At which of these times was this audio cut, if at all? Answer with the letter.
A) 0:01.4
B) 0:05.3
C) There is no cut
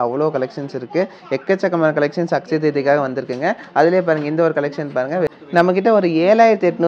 B